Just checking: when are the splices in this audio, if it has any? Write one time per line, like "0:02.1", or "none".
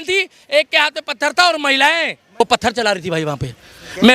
0:02.4